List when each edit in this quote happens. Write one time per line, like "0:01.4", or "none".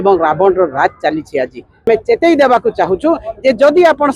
0:01.9